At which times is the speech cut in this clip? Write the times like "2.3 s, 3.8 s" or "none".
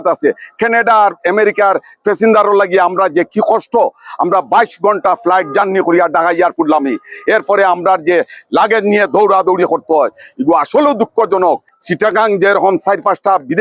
11.7 s